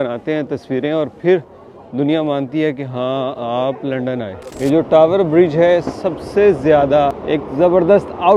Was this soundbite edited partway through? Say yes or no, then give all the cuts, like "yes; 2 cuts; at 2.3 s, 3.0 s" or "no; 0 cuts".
yes; 2 cuts; at 4.4 s, 7.2 s